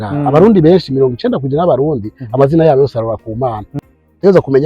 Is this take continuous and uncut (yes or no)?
no